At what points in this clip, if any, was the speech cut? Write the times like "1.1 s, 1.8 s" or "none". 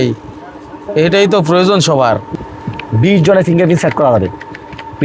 2.3 s